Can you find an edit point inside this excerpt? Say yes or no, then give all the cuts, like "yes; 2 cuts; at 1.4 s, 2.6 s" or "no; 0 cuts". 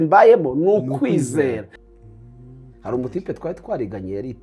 yes; 1 cut; at 1.7 s